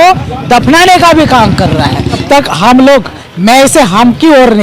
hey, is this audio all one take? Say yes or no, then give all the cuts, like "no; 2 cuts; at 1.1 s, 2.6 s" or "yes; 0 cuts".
no; 1 cut; at 2.2 s